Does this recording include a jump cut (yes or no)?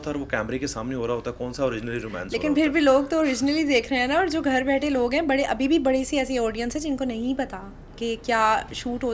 no